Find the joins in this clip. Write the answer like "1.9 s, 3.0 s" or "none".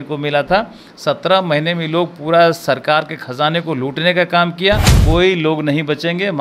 4.9 s